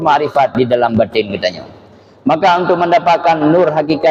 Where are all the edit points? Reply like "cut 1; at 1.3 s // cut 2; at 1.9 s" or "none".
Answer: none